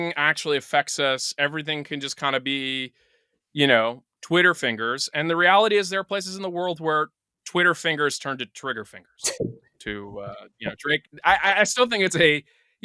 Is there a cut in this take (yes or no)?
no